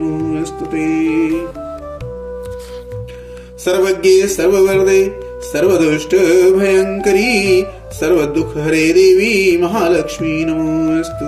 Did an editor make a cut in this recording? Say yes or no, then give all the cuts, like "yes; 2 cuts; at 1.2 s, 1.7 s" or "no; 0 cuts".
no; 0 cuts